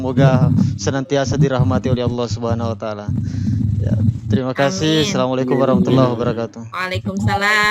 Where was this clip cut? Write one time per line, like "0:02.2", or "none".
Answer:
0:06.6